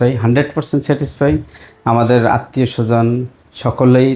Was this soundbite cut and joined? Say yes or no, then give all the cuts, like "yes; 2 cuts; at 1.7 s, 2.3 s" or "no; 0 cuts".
no; 0 cuts